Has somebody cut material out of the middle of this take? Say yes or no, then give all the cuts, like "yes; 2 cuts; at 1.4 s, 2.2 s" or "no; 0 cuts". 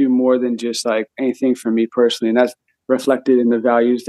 no; 0 cuts